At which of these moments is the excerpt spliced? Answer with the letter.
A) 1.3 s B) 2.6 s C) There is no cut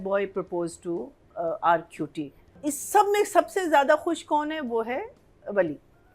B